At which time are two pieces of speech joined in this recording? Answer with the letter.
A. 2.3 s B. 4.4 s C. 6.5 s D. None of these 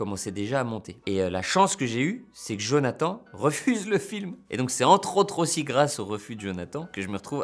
B